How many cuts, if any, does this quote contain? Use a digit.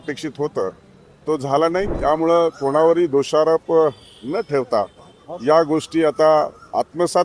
1